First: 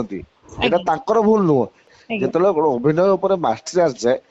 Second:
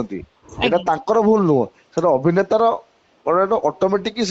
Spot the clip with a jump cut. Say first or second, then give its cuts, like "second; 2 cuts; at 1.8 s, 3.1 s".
first; 1 cut; at 1.9 s